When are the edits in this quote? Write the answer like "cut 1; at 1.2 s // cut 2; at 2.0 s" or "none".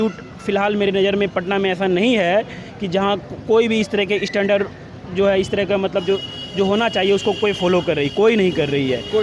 none